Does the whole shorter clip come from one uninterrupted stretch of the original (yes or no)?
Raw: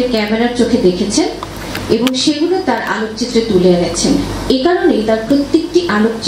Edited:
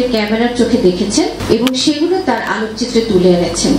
no